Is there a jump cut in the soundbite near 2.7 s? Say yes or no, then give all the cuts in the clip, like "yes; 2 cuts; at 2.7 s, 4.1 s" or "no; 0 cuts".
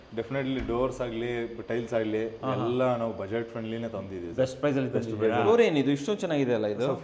no; 1 cut; at 5.4 s